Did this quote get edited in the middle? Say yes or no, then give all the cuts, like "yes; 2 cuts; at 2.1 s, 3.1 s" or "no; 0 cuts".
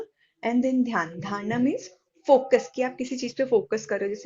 no; 0 cuts